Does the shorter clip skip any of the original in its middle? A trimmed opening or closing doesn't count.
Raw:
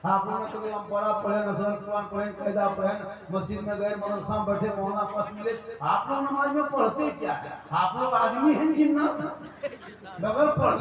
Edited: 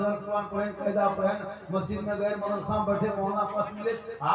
no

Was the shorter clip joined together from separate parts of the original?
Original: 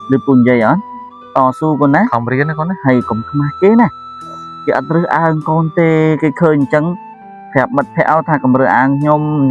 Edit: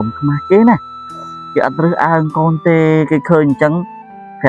no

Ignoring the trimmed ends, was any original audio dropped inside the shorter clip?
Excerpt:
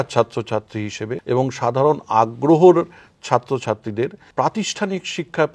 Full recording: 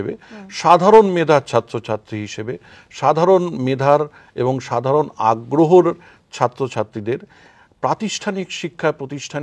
yes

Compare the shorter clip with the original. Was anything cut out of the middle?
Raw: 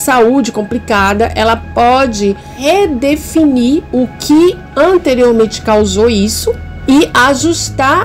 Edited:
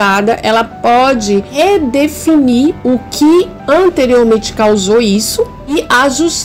yes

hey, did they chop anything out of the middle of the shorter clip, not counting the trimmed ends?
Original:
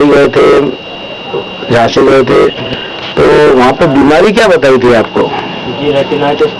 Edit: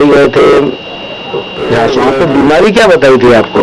yes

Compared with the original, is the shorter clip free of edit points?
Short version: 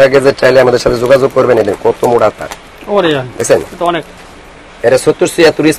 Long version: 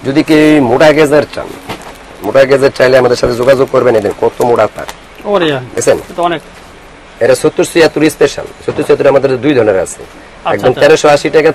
yes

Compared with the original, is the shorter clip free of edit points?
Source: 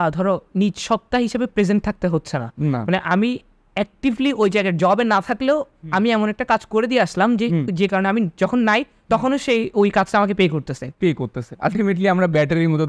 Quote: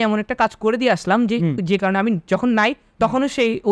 yes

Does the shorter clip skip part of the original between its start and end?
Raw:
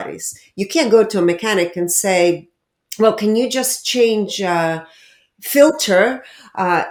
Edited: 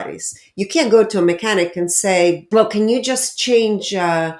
yes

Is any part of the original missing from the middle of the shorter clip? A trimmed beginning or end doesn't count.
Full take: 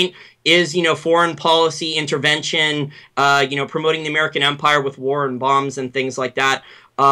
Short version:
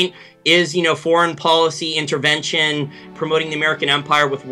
yes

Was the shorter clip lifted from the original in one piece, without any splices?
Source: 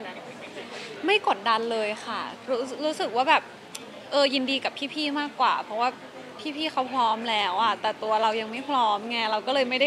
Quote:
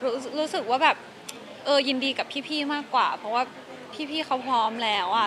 yes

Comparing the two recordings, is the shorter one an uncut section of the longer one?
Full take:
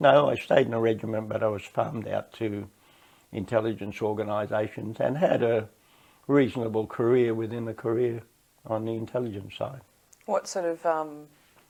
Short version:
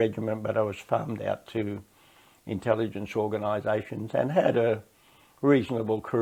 yes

